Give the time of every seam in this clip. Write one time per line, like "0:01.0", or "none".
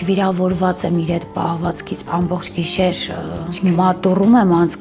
0:02.0